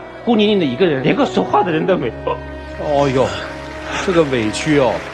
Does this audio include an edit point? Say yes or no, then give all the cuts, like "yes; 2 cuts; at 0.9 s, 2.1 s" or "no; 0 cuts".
no; 0 cuts